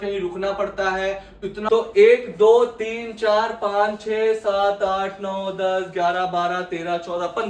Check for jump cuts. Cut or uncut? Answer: cut